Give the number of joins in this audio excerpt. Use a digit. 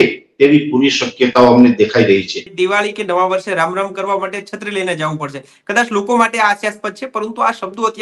1